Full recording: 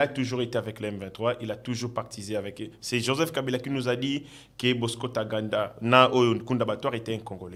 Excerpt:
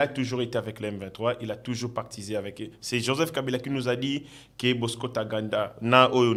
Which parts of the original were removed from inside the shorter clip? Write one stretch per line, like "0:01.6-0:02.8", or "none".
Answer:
none